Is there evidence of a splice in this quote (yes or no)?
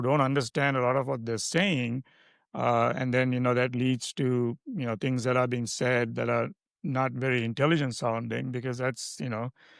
no